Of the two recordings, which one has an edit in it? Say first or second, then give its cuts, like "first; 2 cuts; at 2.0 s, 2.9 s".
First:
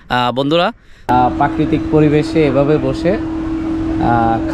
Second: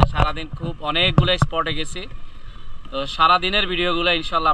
first; 1 cut; at 1.1 s